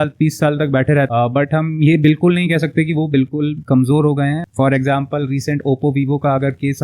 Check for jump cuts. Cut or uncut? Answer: cut